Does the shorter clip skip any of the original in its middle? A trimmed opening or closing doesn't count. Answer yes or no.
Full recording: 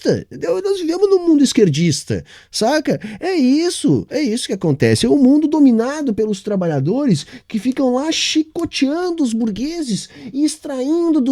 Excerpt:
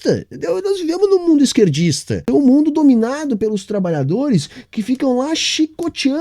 yes